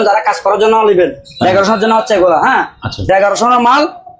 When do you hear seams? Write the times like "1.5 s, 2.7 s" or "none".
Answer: none